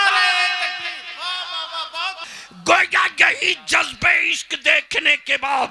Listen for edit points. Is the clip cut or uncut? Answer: cut